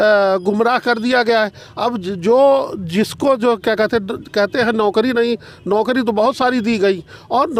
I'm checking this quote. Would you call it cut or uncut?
uncut